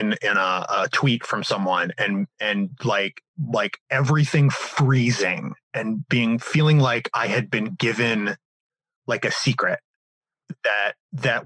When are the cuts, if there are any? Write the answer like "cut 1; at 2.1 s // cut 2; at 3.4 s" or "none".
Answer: none